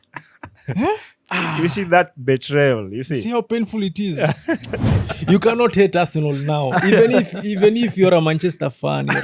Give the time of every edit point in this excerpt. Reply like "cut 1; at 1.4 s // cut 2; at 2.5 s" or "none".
cut 1; at 4.9 s

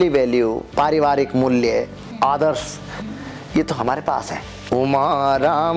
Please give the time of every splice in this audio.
cut 1; at 4.5 s

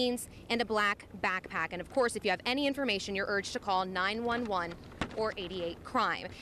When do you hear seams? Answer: none

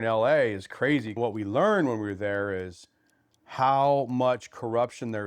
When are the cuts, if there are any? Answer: cut 1; at 1.1 s

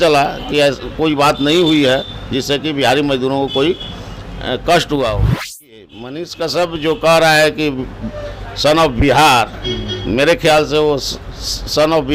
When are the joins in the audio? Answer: cut 1; at 5.7 s

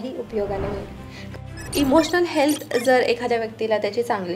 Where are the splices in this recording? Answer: cut 1; at 1.3 s

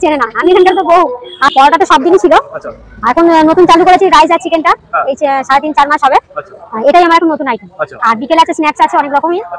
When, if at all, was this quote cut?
cut 1; at 1.5 s

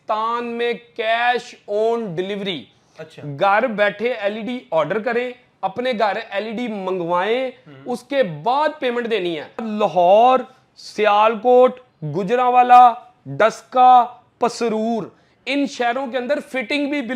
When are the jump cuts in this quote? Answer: cut 1; at 9.7 s

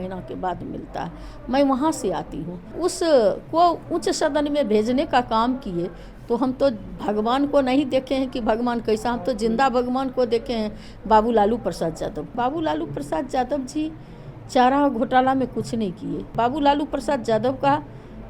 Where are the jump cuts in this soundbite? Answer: cut 1; at 2.7 s // cut 2; at 12.3 s // cut 3; at 16.3 s

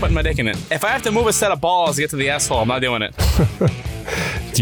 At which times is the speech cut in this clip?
none

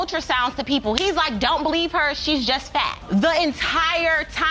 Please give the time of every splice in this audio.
none

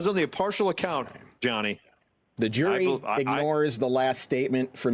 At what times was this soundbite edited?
none

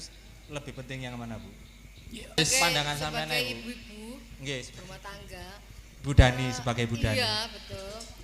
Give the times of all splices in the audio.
cut 1; at 2.4 s

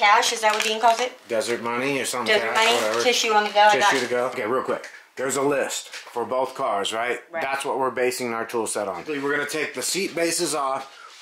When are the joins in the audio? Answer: cut 1; at 4.3 s // cut 2; at 9.1 s

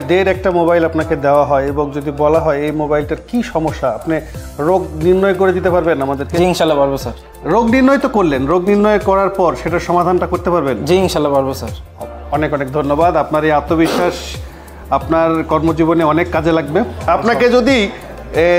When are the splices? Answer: cut 1; at 17.1 s

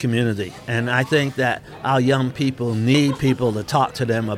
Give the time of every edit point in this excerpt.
cut 1; at 2.9 s

